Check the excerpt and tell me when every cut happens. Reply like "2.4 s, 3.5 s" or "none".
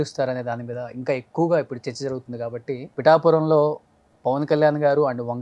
2.9 s